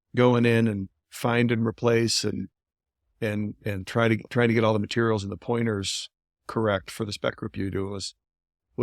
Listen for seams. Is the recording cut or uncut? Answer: uncut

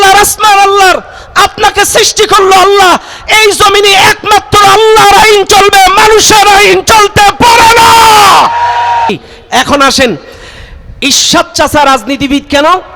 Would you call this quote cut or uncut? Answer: cut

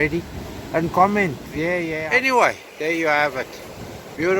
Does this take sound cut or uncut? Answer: cut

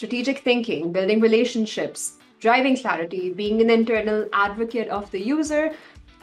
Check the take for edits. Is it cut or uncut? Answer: uncut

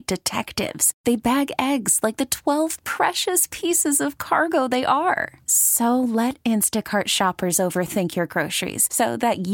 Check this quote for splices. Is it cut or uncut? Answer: uncut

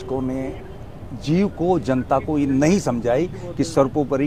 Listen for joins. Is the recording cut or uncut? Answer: uncut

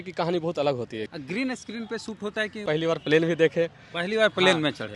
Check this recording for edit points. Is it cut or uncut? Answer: cut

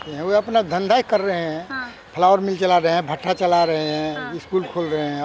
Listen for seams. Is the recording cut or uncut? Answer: uncut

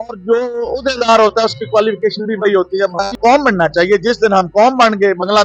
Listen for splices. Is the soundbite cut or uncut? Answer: cut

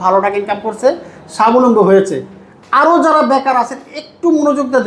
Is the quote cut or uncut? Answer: uncut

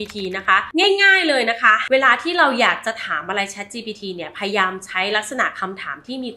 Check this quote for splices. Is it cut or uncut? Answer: cut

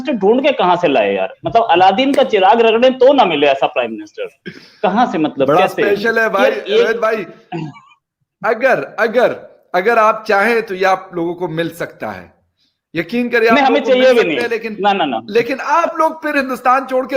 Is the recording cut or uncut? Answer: uncut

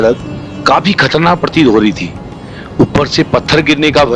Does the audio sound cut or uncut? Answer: uncut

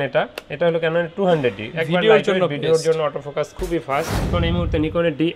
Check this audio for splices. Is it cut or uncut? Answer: cut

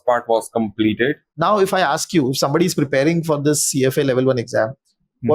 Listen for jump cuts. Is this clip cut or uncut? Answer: cut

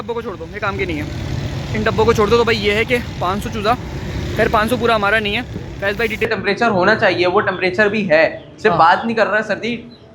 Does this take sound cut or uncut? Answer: cut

